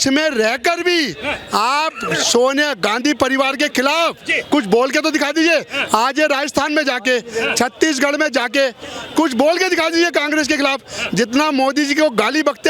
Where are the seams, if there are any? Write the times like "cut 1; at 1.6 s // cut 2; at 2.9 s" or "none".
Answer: none